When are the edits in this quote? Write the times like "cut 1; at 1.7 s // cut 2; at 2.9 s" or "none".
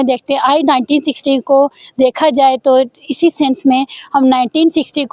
none